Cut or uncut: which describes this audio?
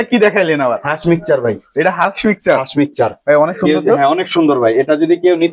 uncut